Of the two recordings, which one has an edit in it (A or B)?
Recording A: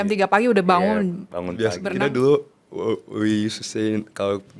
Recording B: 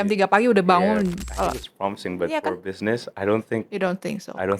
B